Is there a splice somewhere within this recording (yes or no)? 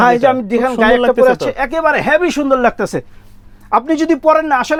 no